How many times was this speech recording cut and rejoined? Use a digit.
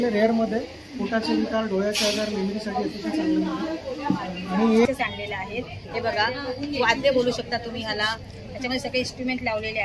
1